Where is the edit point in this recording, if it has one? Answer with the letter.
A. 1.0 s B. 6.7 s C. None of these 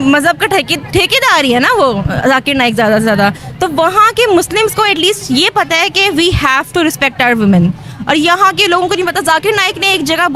C